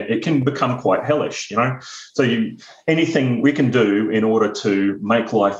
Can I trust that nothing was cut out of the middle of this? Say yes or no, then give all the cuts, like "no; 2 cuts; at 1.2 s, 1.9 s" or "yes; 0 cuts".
yes; 0 cuts